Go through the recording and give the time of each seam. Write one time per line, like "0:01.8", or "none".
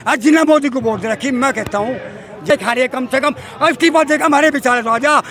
0:02.5